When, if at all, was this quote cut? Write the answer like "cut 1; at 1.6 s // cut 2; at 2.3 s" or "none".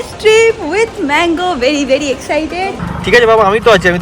cut 1; at 2.8 s

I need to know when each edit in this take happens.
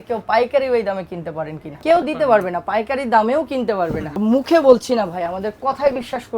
cut 1; at 1.6 s // cut 2; at 4.1 s

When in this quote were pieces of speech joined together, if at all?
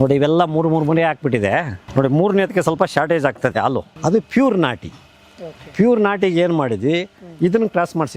cut 1; at 1.8 s // cut 2; at 3.9 s

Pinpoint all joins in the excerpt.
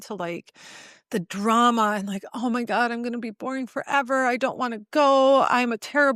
none

